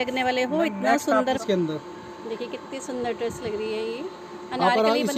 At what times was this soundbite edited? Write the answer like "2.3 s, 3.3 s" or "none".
1.3 s